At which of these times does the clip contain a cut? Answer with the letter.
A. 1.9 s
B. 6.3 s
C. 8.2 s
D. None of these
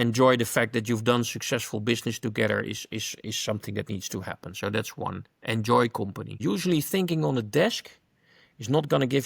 B